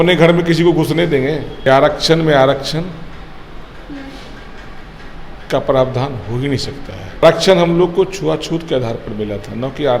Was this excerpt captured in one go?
no; 2 cuts; at 1.5 s, 7.2 s

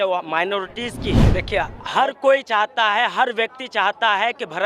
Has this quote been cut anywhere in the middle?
yes; 1 cut; at 1.2 s

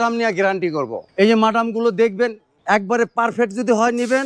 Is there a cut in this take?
yes; 2 cuts; at 1.0 s, 2.5 s

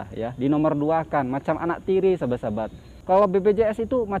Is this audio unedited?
no; 1 cut; at 2.9 s

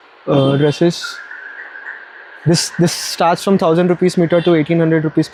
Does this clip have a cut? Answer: no; 0 cuts

